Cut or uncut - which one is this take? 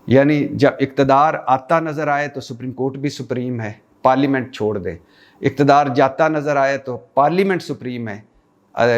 uncut